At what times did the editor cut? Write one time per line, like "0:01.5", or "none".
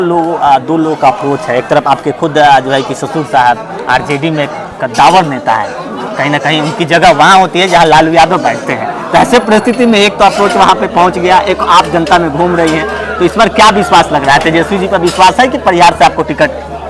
none